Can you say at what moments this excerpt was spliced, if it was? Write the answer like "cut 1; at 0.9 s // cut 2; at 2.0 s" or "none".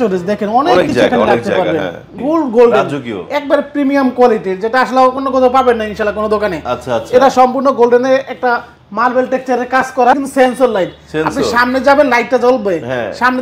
cut 1; at 2.2 s // cut 2; at 10.2 s